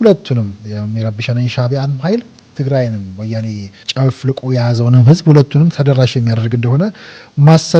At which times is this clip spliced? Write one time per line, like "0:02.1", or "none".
0:02.4
0:03.9
0:05.7